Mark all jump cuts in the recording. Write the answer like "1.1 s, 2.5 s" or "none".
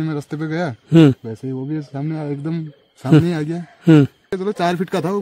4.3 s